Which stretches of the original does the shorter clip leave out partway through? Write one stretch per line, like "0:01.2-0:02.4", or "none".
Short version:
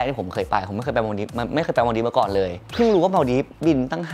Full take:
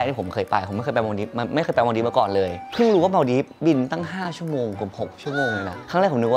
none